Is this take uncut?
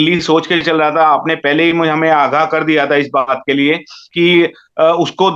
no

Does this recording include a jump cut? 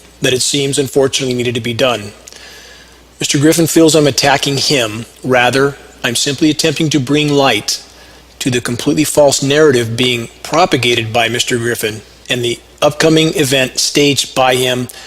yes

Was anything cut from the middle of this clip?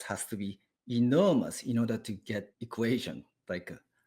yes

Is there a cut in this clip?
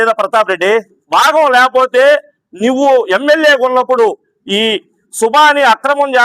yes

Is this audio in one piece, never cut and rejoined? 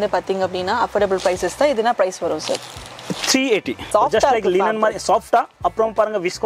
no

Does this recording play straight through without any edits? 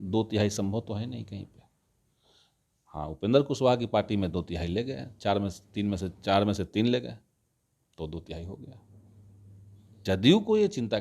no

